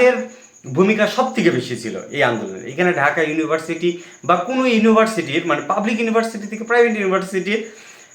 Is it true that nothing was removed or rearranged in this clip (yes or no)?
yes